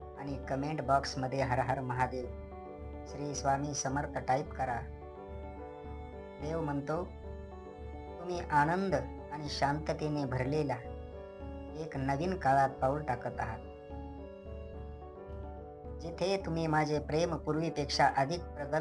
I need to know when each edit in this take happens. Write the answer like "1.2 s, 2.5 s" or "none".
13.5 s, 15.9 s